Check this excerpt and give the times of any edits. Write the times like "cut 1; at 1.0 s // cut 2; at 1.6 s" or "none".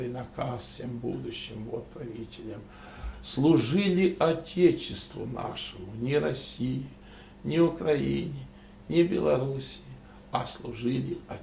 none